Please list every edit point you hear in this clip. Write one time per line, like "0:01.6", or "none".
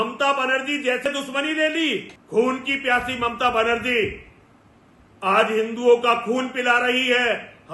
0:01.0
0:02.2